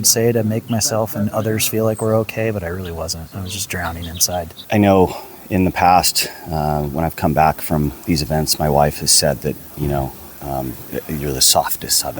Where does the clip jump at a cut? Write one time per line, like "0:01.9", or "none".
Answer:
0:04.7